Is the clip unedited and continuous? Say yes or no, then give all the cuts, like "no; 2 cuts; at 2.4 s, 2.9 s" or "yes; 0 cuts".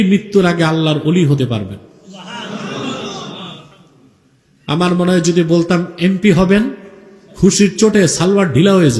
yes; 0 cuts